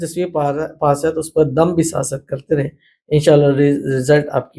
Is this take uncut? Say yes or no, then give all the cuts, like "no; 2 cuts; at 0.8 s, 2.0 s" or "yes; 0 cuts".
yes; 0 cuts